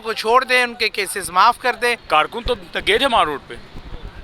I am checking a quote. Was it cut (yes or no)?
yes